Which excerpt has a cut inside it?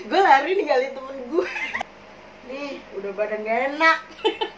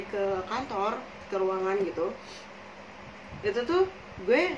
first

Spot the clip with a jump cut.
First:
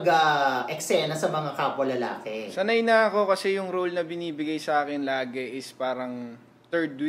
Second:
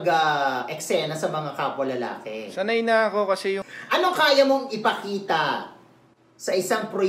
second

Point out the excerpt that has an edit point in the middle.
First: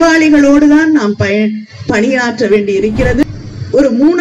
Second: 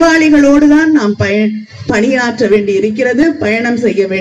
first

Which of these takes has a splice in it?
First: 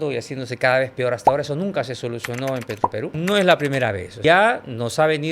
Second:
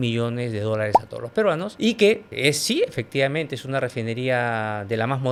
first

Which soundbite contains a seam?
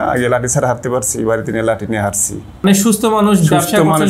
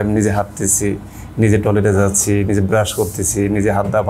first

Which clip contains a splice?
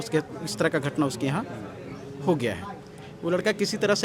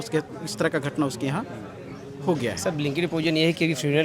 second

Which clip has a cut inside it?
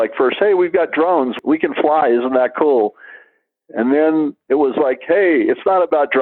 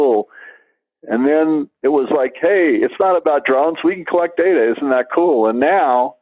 first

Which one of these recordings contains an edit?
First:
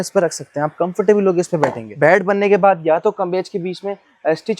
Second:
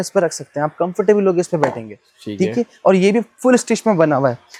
first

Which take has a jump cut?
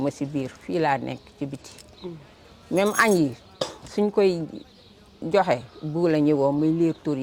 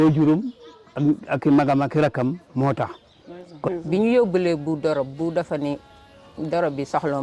second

